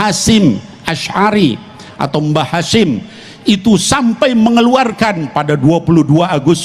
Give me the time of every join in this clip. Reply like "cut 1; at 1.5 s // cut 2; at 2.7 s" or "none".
none